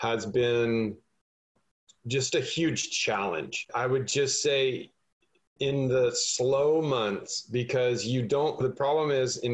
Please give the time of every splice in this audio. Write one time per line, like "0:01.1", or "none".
none